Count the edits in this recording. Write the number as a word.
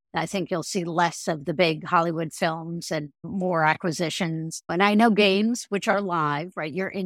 two